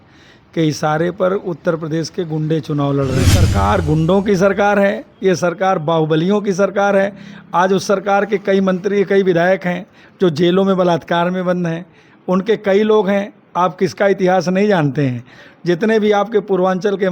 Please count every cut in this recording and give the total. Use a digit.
1